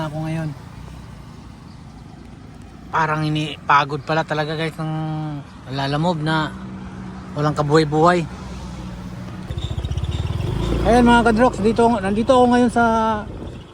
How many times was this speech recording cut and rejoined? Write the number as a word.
one